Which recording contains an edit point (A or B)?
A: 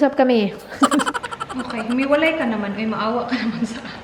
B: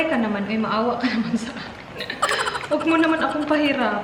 A